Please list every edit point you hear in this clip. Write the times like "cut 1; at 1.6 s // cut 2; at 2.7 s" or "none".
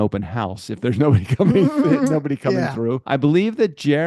cut 1; at 3.0 s

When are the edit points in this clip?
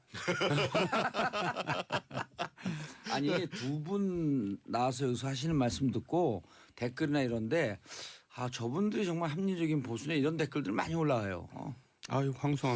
none

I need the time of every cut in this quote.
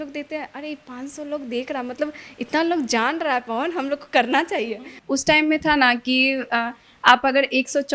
cut 1; at 5.0 s

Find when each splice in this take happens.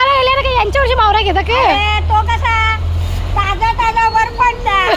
none

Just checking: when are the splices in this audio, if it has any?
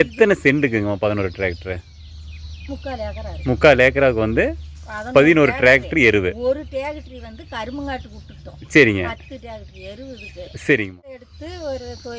cut 1; at 11.3 s

